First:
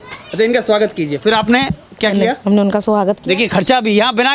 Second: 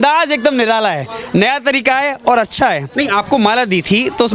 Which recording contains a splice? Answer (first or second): second